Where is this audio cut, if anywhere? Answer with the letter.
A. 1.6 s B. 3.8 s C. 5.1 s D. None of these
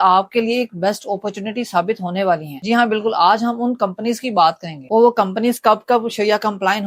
D